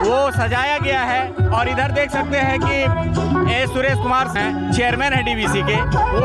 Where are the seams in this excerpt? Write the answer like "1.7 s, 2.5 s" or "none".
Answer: 4.3 s

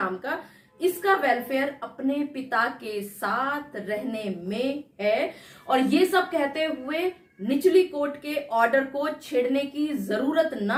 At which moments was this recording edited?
none

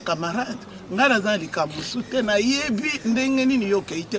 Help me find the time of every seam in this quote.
none

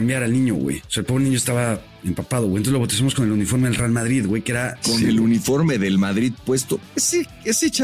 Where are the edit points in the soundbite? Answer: 4.7 s

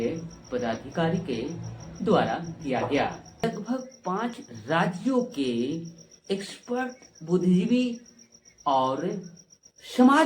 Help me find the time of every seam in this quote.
3.4 s

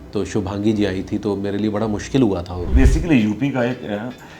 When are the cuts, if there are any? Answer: 2.7 s

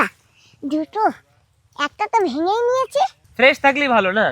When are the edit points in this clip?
3.2 s

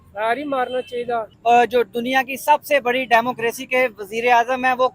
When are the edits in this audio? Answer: 1.3 s

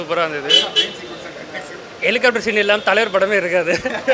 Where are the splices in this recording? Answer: none

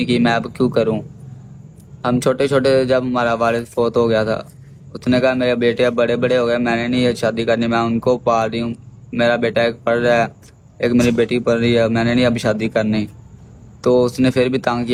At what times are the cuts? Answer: none

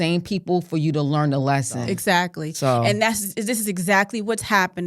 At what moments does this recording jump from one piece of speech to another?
1.7 s

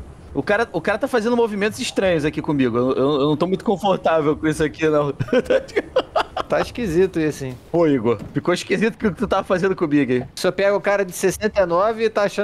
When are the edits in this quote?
7.5 s, 10.3 s

